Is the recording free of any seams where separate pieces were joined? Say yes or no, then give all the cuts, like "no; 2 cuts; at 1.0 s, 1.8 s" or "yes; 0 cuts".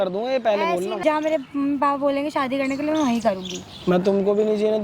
no; 1 cut; at 1.0 s